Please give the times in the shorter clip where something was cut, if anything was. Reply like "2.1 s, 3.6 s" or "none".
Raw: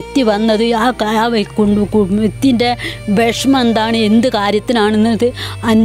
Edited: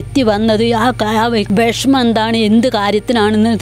1.5 s